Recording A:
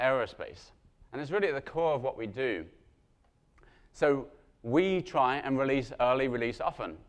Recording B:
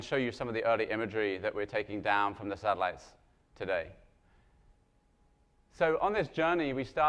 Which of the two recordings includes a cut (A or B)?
A